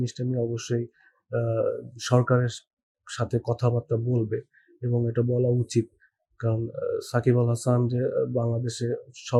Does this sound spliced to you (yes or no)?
no